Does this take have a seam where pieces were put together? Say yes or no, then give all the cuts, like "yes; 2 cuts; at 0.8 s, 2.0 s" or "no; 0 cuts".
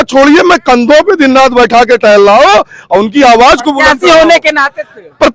no; 0 cuts